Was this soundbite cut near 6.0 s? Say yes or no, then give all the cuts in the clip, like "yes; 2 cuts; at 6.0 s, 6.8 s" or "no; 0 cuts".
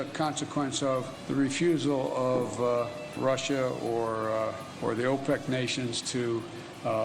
no; 3 cuts; at 1.1 s, 3.1 s, 4.7 s